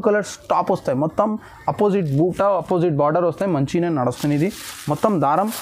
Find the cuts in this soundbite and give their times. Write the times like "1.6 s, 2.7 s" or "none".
none